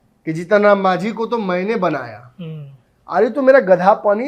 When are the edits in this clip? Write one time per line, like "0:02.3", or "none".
none